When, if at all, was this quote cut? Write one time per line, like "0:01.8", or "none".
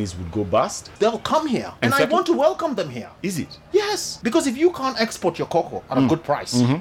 0:00.9
0:01.7
0:03.0
0:04.1